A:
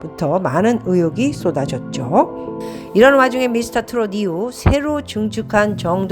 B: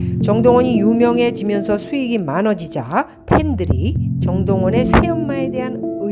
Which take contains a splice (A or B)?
A